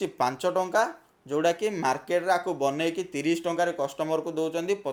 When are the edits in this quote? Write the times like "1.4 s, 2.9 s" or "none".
none